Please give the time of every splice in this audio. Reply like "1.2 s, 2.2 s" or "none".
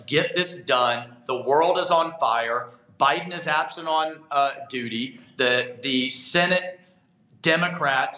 none